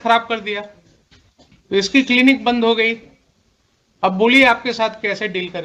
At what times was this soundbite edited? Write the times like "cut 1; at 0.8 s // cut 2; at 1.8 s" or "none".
cut 1; at 1.9 s // cut 2; at 4.1 s